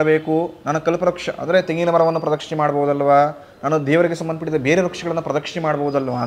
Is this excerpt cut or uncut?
uncut